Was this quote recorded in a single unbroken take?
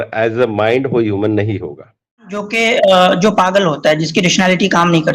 no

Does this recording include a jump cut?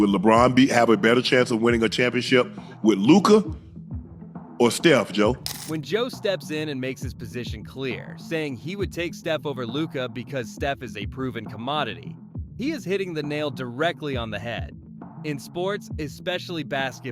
no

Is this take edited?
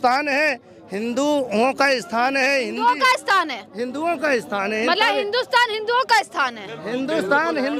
no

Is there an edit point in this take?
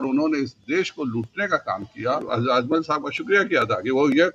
yes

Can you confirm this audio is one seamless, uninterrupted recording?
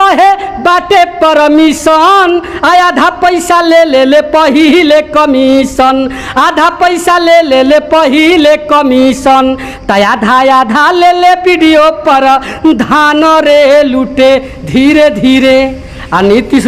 yes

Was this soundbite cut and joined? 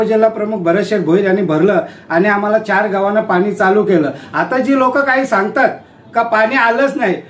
no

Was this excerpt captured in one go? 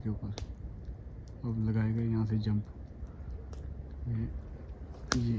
yes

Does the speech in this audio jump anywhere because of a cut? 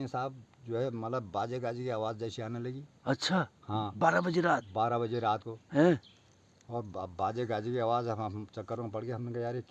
no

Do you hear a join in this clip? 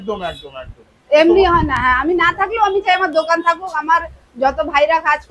no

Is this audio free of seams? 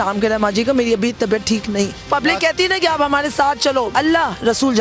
no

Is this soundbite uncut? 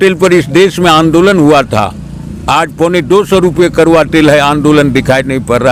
yes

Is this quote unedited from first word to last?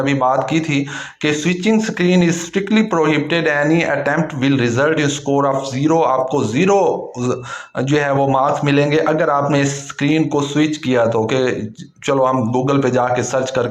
yes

